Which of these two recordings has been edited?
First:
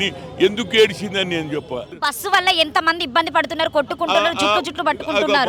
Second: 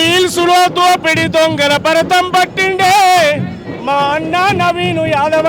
first; 1 cut; at 2.0 s

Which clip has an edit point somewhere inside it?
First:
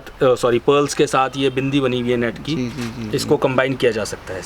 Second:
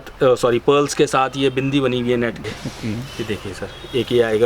second; 1 cut; at 2.4 s

